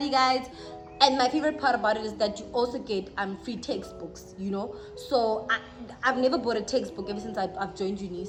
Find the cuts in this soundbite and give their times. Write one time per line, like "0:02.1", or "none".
none